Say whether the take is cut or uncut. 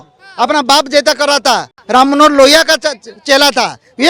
cut